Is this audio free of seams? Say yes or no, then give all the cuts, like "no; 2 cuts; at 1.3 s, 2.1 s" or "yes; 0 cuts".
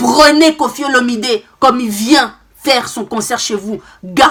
yes; 0 cuts